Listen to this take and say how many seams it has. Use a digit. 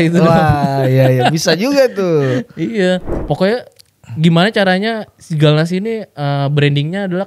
1